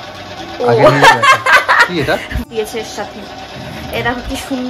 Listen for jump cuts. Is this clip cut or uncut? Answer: cut